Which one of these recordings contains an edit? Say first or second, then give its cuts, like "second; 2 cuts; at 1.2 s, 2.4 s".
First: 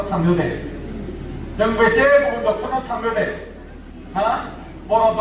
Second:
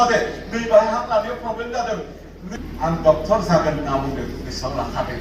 second; 1 cut; at 2.5 s